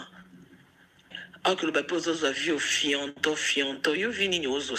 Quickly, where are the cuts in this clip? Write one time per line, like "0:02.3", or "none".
0:01.2